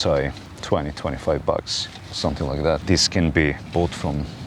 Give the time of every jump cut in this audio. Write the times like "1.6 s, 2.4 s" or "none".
2.8 s

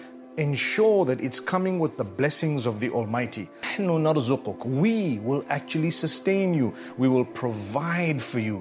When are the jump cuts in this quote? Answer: 3.7 s

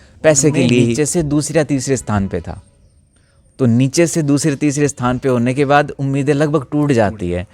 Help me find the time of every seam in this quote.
0.9 s

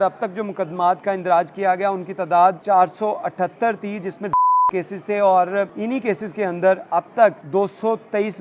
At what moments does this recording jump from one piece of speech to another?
2.6 s, 5.7 s, 7.4 s

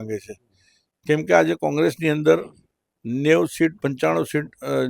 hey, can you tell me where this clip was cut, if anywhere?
none

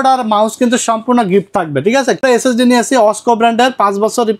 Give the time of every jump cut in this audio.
2.2 s

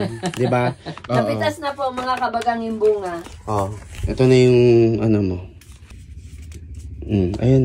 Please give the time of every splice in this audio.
1.0 s, 3.2 s, 6.0 s

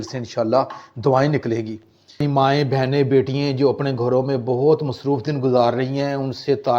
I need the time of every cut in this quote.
2.2 s

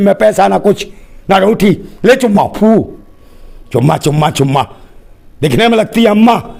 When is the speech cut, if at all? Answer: none

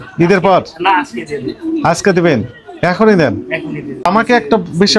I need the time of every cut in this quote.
4.0 s

